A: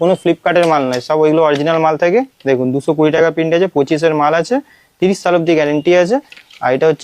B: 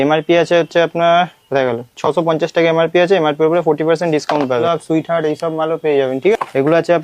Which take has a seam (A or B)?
B